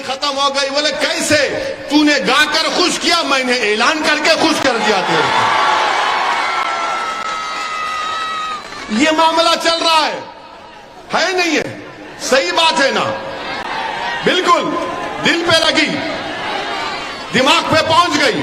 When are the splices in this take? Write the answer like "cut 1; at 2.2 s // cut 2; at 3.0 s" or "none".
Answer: none